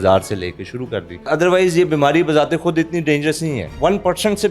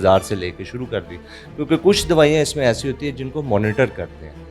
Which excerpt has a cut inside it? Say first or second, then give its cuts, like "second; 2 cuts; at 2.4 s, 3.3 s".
first; 2 cuts; at 1.3 s, 3.7 s